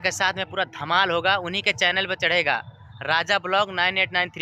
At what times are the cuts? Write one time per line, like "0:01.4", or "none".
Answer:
none